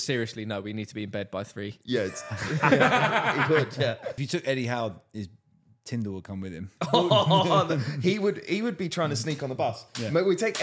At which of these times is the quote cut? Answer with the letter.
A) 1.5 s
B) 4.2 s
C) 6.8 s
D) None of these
B